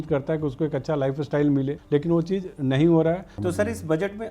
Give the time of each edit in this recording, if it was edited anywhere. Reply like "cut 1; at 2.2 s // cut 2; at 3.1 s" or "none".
cut 1; at 1.8 s // cut 2; at 3.3 s